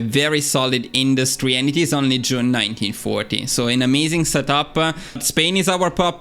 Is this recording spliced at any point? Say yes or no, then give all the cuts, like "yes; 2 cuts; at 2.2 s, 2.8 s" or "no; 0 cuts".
yes; 1 cut; at 5.2 s